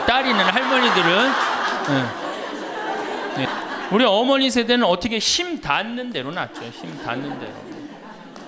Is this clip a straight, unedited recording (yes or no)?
no